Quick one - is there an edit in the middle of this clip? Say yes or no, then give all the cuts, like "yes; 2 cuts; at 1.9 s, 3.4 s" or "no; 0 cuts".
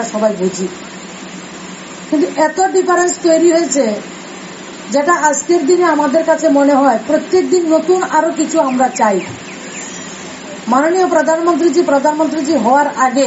no; 0 cuts